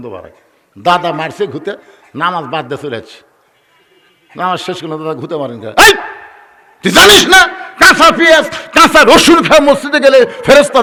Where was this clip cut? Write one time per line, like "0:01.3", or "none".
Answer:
none